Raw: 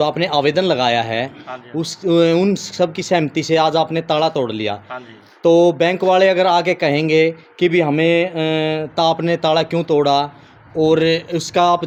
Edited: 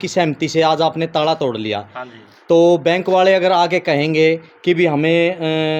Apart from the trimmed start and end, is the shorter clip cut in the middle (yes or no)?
no